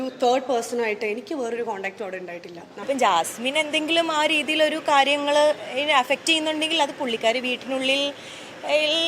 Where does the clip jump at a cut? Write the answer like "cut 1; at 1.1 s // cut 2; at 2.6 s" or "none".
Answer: cut 1; at 2.8 s